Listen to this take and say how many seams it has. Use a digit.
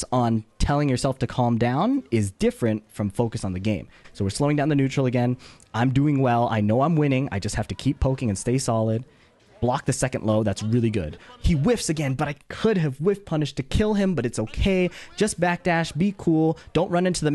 1